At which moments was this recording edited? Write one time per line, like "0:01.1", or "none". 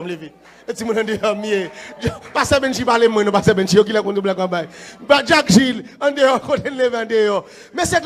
none

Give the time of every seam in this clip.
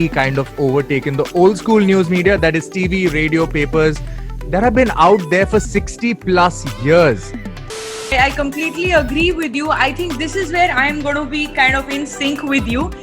0:07.8

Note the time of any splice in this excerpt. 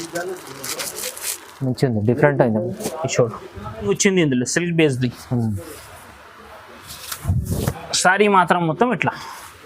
0:03.9

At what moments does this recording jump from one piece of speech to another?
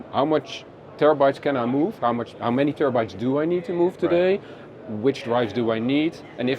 none

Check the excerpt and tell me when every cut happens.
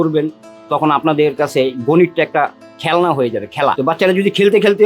0:03.8

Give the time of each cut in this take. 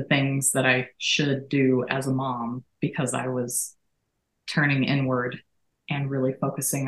none

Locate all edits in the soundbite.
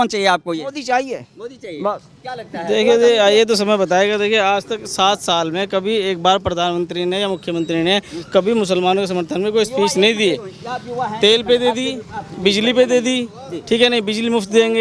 none

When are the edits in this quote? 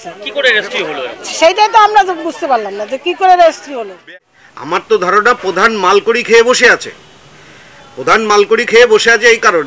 0:04.1

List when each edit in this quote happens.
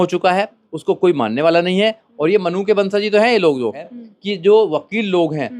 0:03.9

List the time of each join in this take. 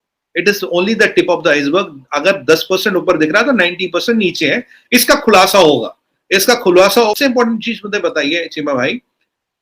0:07.1

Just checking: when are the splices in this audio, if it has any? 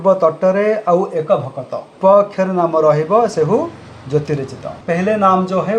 0:02.0
0:04.8

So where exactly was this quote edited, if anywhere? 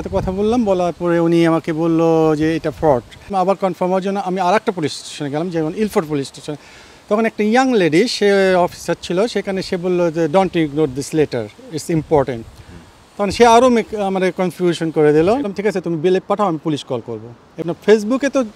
0:03.3
0:15.5
0:17.6

